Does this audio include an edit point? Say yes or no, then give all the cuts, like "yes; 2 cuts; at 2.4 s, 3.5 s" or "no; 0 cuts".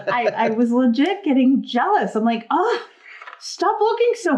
no; 0 cuts